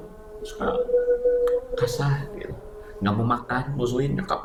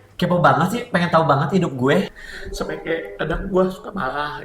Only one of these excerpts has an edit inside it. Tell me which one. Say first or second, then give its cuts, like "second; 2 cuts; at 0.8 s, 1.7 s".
second; 1 cut; at 2.2 s